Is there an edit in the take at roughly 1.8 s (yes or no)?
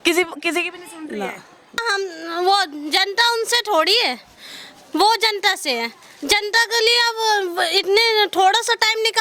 yes